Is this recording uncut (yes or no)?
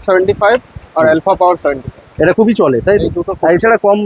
yes